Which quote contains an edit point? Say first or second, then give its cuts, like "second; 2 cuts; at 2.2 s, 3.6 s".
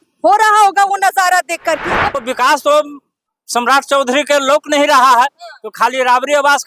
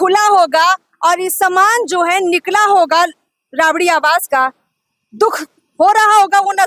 first; 1 cut; at 2.1 s